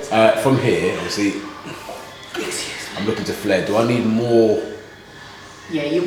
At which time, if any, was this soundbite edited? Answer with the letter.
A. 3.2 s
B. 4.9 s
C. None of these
C